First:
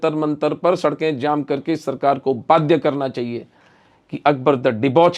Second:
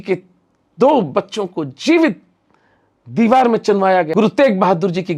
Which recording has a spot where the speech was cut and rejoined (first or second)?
second